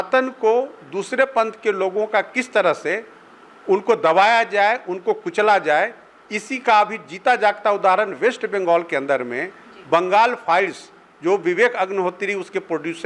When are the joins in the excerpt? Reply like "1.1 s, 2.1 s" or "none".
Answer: none